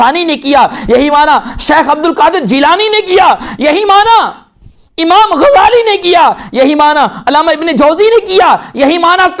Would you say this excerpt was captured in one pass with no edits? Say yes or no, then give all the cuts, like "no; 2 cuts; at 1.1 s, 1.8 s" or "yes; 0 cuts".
yes; 0 cuts